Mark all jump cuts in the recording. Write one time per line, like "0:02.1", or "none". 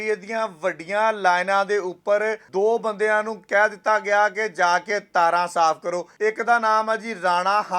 0:02.4
0:06.1